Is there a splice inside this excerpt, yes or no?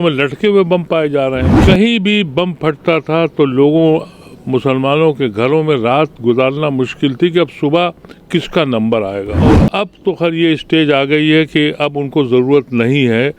yes